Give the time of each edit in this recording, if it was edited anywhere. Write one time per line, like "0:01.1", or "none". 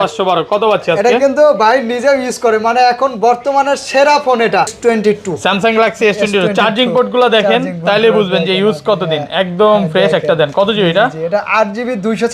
0:04.7